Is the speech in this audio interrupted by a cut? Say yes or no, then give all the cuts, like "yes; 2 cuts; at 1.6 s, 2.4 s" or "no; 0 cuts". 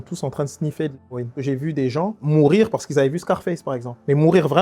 yes; 1 cut; at 1.3 s